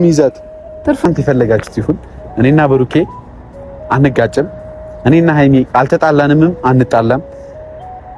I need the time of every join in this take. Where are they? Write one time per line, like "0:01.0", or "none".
0:01.1